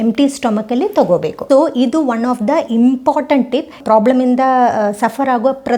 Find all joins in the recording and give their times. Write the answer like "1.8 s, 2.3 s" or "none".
1.3 s